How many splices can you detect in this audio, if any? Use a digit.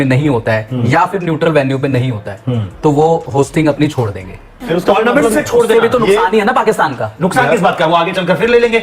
1